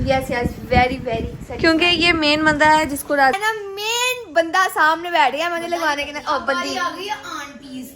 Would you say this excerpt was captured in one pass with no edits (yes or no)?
no